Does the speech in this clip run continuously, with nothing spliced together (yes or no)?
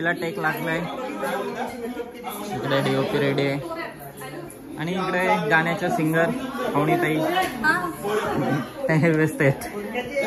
yes